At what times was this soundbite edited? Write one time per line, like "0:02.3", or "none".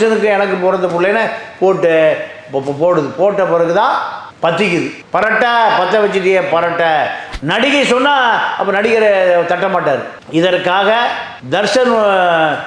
0:07.2

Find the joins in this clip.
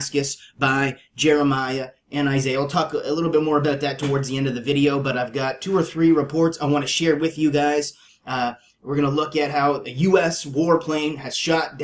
0:08.9

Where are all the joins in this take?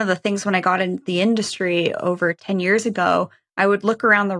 0:02.4

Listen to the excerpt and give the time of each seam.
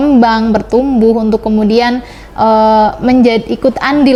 none

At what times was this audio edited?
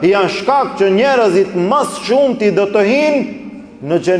none

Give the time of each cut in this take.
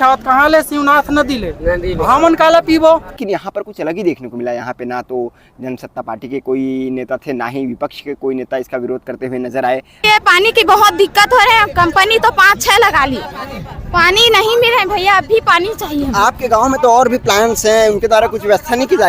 0:03.2
0:10.1

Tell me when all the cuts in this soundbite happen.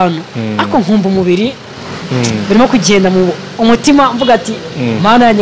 none

